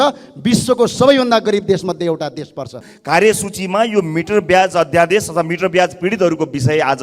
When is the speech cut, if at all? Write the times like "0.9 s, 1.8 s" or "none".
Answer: 2.9 s